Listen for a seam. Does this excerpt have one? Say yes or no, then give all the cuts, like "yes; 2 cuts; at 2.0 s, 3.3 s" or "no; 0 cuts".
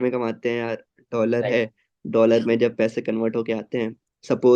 no; 0 cuts